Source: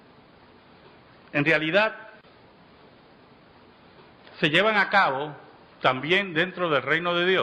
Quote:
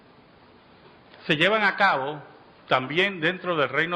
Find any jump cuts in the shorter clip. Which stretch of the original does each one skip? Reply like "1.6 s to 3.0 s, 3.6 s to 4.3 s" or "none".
1.0 s to 4.1 s